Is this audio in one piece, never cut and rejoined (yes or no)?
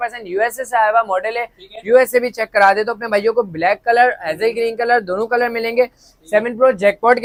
yes